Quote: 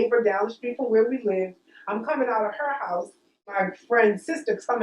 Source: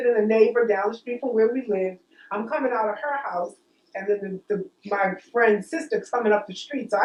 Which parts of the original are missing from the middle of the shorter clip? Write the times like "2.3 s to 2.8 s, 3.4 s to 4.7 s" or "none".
4.0 s to 5.0 s